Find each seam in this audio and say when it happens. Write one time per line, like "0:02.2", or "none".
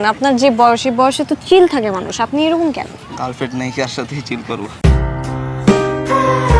none